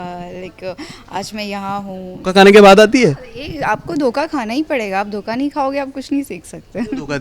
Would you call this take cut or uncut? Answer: cut